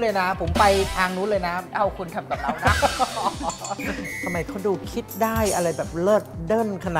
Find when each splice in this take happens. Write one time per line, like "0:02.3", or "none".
0:01.6
0:04.1